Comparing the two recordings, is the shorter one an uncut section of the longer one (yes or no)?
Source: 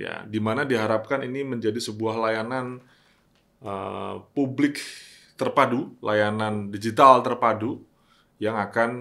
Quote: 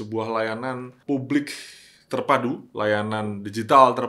no